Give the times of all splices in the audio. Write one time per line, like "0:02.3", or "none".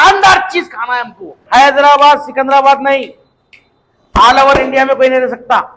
0:01.3